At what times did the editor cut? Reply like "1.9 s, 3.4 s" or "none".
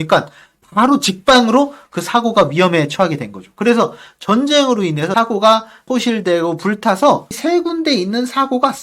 5.1 s, 5.9 s, 7.3 s